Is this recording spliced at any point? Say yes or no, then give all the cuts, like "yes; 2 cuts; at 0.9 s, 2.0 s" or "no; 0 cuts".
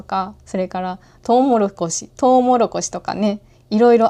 no; 0 cuts